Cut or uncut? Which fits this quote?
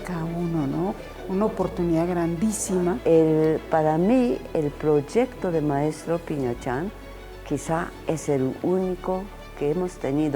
cut